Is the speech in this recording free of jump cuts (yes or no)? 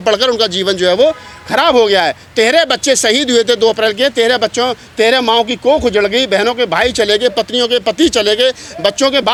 yes